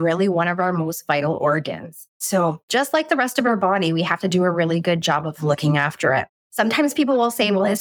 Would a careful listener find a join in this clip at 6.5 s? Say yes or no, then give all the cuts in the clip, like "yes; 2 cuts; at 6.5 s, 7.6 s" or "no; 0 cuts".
yes; 2 cuts; at 2.3 s, 6.5 s